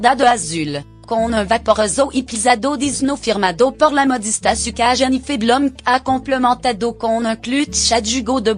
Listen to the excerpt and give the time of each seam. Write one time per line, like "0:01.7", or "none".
0:04.7